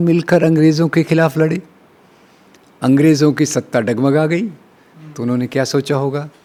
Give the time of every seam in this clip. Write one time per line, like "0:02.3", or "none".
none